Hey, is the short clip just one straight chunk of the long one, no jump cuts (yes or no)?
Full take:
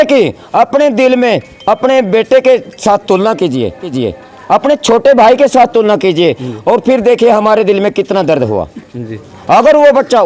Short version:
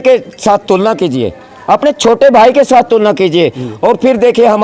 no